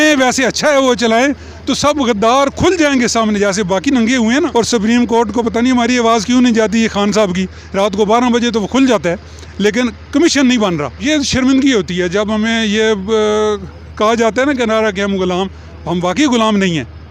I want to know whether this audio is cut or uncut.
cut